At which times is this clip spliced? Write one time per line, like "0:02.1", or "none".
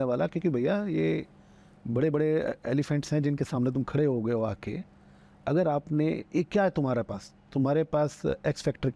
none